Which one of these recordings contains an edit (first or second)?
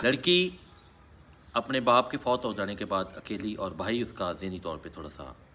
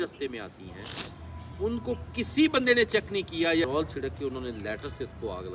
second